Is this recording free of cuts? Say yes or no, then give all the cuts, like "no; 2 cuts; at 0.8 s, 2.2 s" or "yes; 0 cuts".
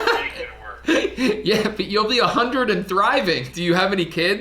no; 1 cut; at 3.5 s